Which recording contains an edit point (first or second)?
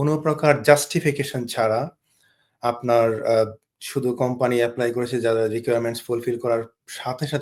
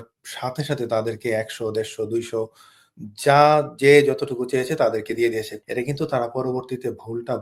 second